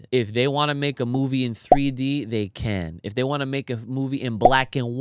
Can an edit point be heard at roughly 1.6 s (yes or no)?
no